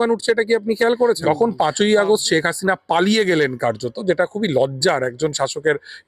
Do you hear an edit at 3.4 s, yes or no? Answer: no